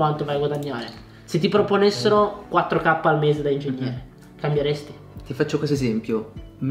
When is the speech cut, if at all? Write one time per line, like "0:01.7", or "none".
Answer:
0:05.1